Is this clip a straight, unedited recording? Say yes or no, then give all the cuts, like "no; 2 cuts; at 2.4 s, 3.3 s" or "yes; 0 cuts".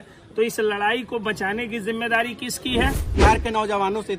no; 1 cut; at 3.1 s